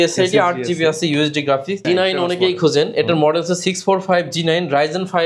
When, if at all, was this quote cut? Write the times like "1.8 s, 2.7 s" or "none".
1.9 s